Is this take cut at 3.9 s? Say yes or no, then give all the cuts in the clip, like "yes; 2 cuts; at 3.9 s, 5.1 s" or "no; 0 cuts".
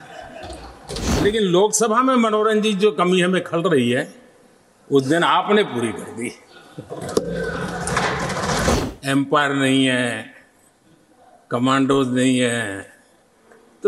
no; 2 cuts; at 1.2 s, 8.7 s